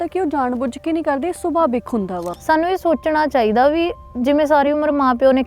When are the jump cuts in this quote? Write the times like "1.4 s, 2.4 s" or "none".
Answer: 2.3 s